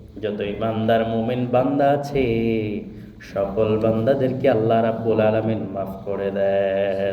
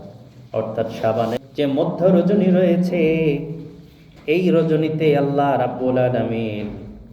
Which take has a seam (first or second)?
second